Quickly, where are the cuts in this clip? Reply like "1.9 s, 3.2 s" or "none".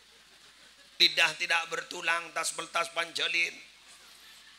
0.9 s